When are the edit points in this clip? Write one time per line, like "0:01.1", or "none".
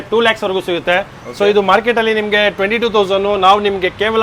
none